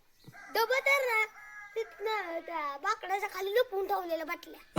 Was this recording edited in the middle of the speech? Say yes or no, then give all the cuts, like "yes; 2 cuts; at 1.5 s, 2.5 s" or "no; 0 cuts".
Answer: no; 0 cuts